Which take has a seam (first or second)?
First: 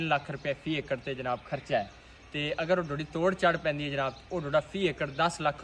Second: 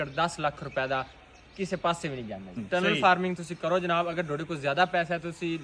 second